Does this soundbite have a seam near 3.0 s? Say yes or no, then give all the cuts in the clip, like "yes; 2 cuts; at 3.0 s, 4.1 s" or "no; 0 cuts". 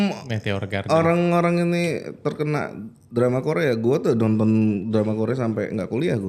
no; 0 cuts